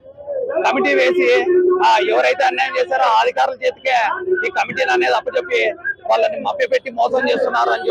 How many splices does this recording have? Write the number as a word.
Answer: zero